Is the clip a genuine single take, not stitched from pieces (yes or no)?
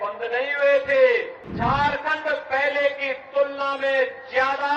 no